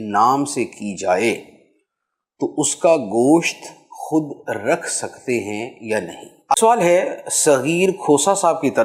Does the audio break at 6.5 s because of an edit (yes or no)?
yes